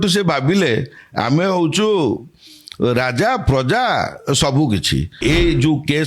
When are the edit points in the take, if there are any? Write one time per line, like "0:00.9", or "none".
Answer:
0:05.1